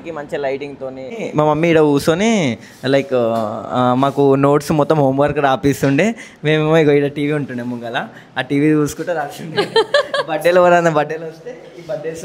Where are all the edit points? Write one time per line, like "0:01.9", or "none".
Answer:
0:01.1